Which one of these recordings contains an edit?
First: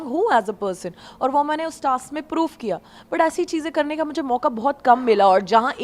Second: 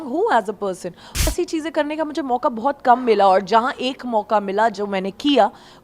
second; 1 cut; at 1.3 s

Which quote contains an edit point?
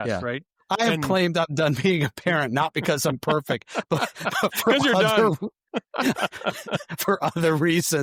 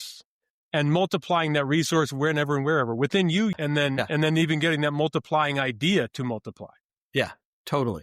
second; 1 cut; at 3.5 s

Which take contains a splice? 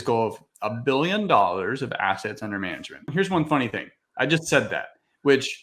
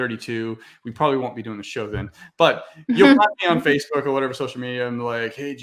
first; 1 cut; at 3.1 s

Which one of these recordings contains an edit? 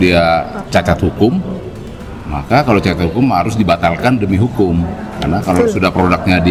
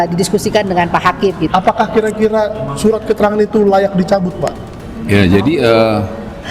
second; 1 cut; at 1.5 s

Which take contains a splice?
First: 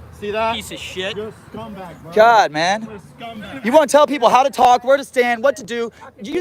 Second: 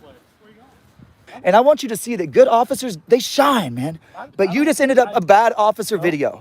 second; 1 cut; at 1.3 s

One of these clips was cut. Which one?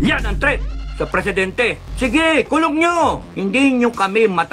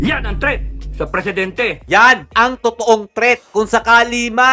first; 2 cuts; at 1.8 s, 3.3 s

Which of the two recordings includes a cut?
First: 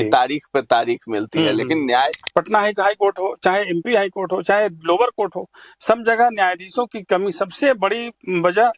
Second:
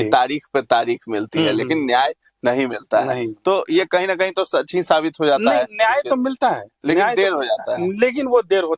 first; 1 cut; at 2.2 s

